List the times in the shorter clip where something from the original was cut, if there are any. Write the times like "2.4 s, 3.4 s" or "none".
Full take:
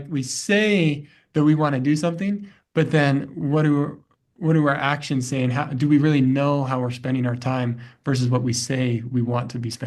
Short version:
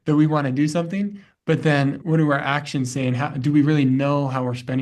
2.0 s